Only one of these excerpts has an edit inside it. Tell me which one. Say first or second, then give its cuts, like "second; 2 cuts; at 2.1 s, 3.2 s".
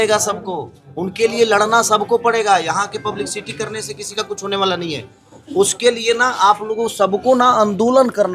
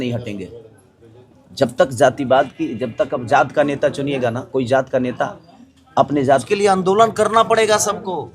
second; 1 cut; at 6.4 s